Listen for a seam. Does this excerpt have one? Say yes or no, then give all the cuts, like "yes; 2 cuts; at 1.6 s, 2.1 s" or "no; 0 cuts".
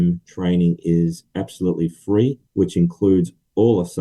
yes; 1 cut; at 2.4 s